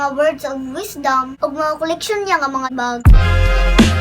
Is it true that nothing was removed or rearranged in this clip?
no; 1 cut; at 2.9 s

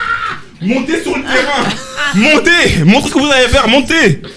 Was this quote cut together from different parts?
no; 0 cuts

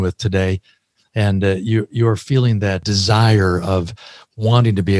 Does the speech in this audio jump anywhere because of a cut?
yes; 1 cut; at 2.8 s

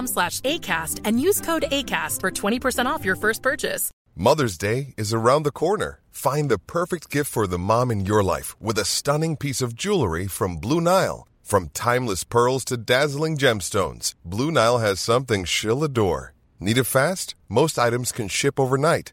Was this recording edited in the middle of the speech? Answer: yes; 1 cut; at 3.9 s

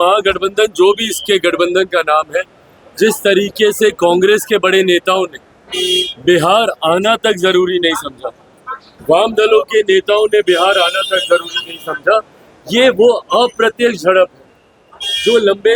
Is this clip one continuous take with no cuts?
yes; 0 cuts

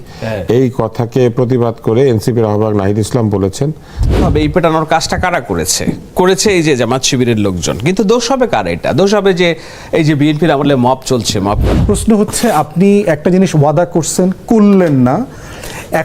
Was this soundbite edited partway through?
yes; 2 cuts; at 4.3 s, 11.7 s

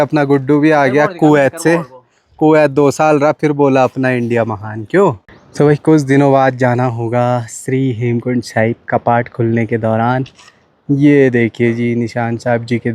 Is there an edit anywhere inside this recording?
yes; 1 cut; at 5.5 s

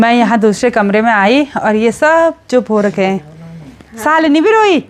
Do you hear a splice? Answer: no; 0 cuts

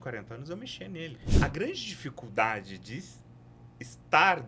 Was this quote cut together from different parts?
yes; 1 cut; at 1.3 s

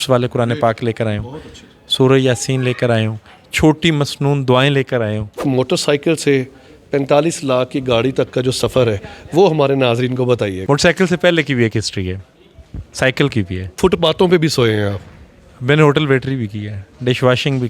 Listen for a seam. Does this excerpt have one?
yes; 3 cuts; at 5.4 s, 10.6 s, 13.7 s

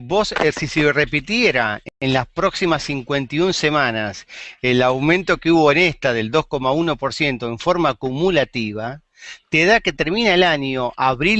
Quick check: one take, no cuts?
yes; 0 cuts

